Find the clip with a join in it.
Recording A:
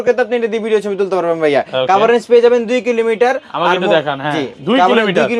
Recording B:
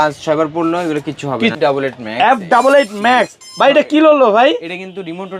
B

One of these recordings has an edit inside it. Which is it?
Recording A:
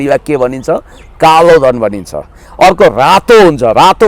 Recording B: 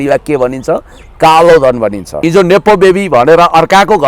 B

